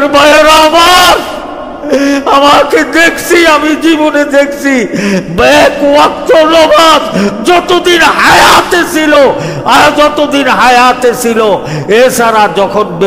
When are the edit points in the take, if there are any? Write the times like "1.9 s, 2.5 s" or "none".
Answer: none